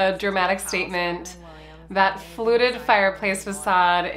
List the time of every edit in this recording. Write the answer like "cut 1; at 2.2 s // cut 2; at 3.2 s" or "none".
none

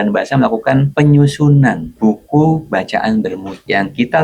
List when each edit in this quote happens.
none

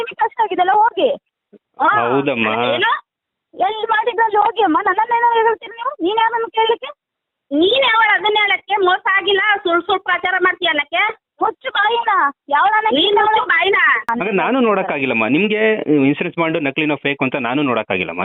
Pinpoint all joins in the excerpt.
cut 1; at 14.1 s

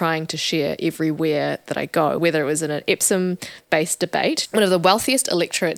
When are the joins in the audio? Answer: cut 1; at 2.2 s // cut 2; at 4.4 s

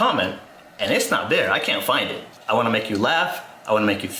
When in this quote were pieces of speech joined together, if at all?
cut 1; at 2.3 s

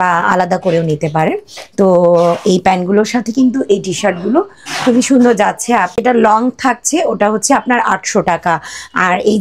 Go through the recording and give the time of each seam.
cut 1; at 5.9 s

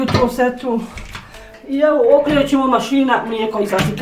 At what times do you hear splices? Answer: cut 1; at 1.5 s

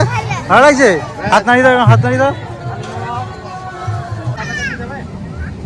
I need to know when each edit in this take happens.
cut 1; at 4.4 s

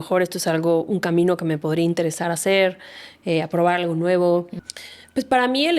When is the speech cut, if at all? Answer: cut 1; at 4.6 s

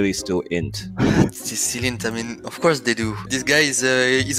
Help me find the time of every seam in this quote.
cut 1; at 3.3 s

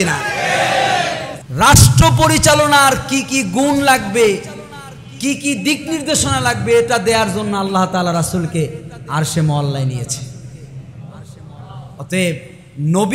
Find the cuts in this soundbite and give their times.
cut 1; at 1.3 s

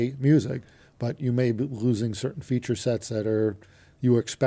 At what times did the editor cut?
none

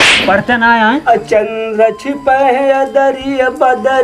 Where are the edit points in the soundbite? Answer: cut 1; at 1.0 s

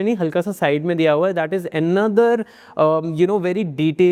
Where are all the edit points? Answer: none

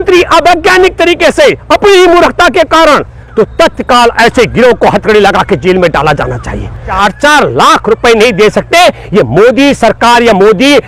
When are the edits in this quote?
cut 1; at 3.2 s // cut 2; at 7.0 s

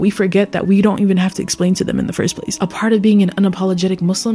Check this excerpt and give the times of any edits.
cut 1; at 2.5 s

